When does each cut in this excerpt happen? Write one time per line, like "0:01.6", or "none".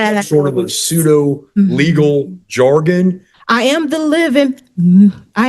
0:03.3